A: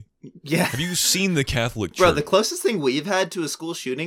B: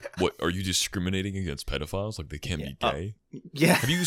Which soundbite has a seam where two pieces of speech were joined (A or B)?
A